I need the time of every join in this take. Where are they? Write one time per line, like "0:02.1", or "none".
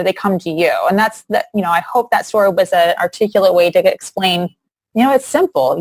none